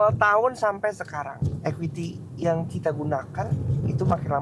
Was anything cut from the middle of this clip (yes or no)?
yes